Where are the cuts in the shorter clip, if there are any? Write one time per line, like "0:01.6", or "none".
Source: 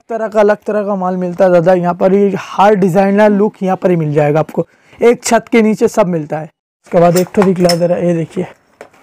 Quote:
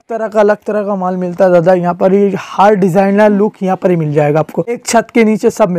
0:04.8